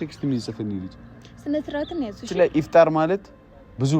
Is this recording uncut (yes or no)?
no